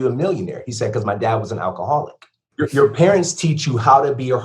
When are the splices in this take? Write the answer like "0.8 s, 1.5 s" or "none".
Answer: 2.5 s